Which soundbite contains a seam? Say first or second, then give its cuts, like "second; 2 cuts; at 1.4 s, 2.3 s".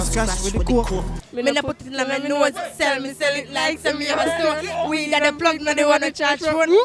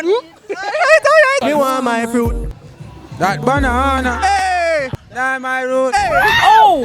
second; 1 cut; at 1.3 s